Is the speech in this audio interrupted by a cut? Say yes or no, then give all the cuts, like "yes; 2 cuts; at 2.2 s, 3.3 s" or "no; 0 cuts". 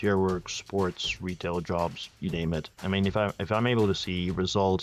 yes; 1 cut; at 2.7 s